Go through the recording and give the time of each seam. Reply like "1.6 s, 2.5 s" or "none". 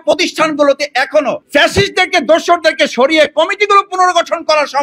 1.4 s